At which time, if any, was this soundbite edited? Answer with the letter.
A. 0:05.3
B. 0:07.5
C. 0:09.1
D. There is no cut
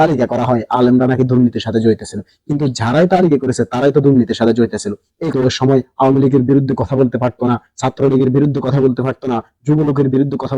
A